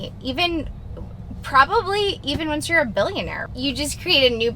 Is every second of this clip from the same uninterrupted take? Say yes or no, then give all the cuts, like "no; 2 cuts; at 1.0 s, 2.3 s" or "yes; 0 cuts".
no; 1 cut; at 3.4 s